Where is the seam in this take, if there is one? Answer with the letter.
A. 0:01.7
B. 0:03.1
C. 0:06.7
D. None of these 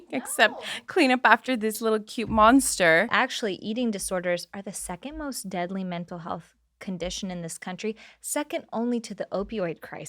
B